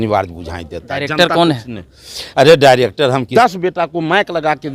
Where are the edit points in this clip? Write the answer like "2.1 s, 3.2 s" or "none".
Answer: 3.3 s